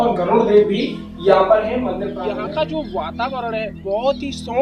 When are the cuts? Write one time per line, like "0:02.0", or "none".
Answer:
0:02.1

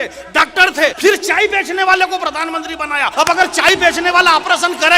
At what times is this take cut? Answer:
0:01.0
0:03.1

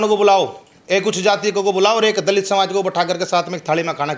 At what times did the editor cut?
none

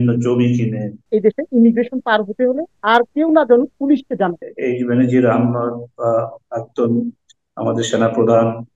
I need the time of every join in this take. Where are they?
0:01.0
0:04.5

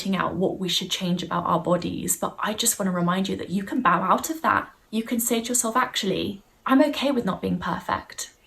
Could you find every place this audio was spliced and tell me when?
0:04.8
0:06.5

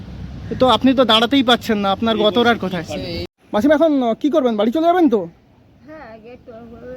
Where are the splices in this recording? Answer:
0:03.3

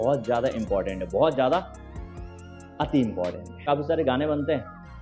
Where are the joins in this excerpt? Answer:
0:03.6

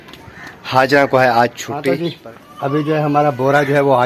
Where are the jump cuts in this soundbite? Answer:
0:01.7

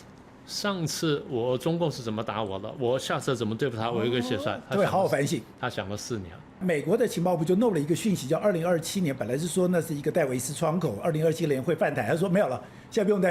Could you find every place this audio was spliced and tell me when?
0:06.6

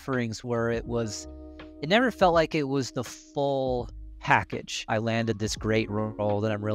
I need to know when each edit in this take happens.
0:04.8

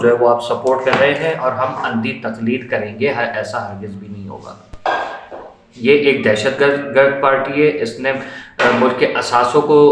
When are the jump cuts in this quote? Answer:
none

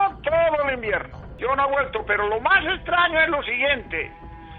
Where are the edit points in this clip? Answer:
0:01.2

